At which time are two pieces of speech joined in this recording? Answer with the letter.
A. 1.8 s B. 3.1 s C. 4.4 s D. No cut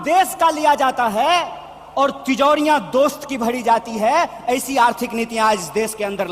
D